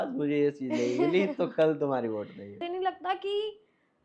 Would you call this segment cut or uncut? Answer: cut